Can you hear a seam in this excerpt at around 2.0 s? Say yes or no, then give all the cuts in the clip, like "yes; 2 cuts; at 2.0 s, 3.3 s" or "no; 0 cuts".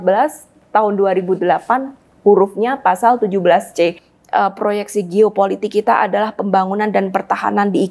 no; 1 cut; at 4.1 s